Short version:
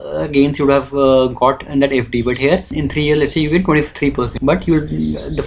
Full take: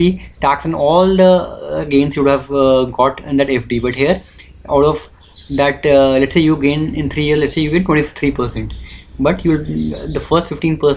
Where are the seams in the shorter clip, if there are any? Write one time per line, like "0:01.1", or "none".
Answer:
0:02.7
0:04.3